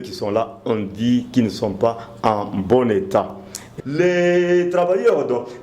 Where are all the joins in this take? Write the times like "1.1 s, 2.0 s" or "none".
3.6 s